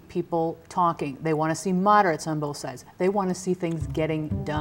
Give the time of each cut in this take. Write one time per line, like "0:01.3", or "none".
none

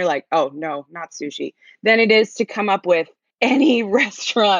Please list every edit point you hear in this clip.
0:03.2

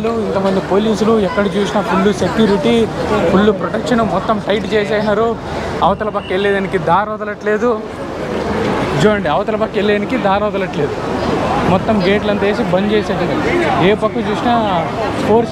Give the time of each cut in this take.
none

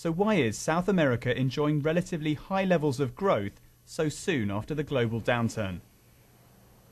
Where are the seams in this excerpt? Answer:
0:01.0

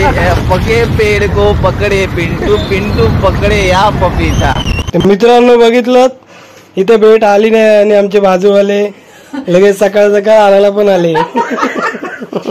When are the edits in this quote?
0:04.6
0:11.2

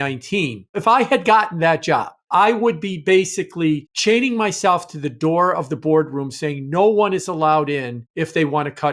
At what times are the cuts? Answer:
0:00.8
0:02.1
0:03.9
0:08.0

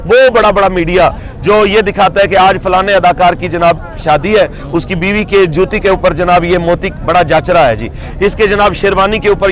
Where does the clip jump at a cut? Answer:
none

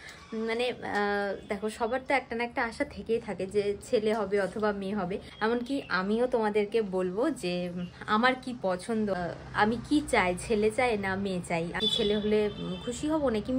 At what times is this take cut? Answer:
0:05.2
0:09.1
0:11.8

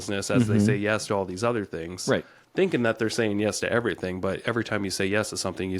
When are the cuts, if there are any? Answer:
none

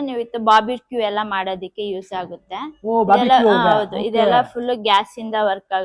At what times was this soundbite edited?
none

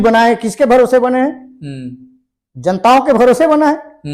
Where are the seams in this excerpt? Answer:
none

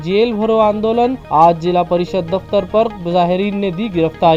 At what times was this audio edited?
none

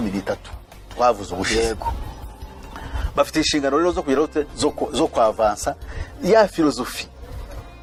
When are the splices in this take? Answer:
none

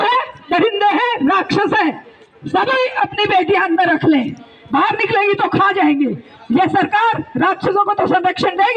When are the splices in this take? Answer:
none

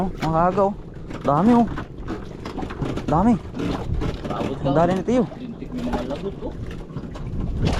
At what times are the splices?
none

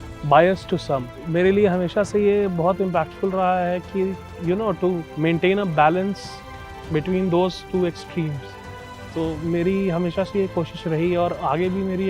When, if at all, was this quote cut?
0:01.2
0:04.3
0:05.1

